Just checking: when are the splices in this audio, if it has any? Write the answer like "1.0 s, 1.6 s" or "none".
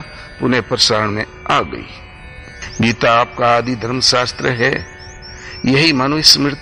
none